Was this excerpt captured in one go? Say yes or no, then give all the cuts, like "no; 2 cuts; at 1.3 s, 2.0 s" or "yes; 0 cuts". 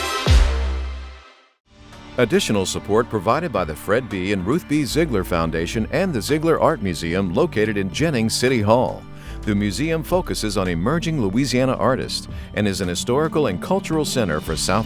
no; 1 cut; at 2.0 s